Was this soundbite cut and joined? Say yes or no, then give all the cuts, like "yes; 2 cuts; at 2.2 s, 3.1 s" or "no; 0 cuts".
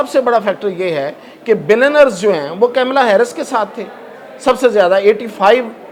no; 0 cuts